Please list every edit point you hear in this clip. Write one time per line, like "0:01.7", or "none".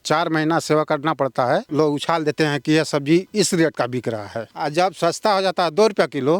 0:01.7
0:04.5